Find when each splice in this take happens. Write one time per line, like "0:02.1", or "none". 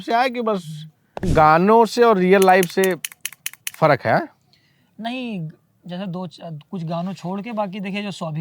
0:01.3